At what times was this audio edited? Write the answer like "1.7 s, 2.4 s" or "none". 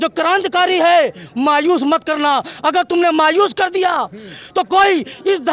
none